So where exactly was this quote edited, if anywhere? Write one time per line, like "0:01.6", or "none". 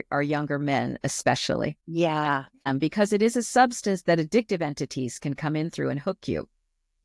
0:01.8
0:02.7